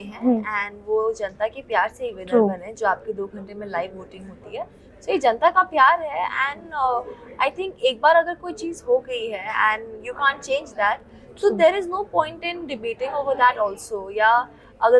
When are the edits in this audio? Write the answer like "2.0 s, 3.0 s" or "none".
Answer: none